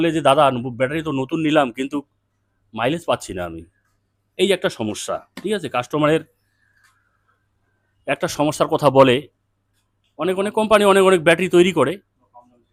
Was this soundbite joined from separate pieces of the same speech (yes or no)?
no